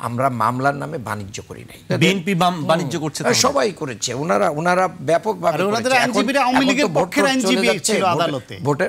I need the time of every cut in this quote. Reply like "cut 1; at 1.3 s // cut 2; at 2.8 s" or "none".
cut 1; at 1.9 s